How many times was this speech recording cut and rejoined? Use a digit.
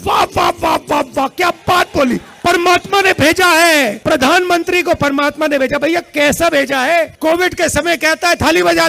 3